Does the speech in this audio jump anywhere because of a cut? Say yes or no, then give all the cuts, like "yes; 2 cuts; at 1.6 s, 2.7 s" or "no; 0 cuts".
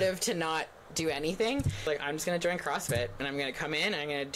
yes; 1 cut; at 1.8 s